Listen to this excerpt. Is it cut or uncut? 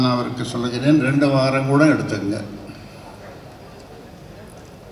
uncut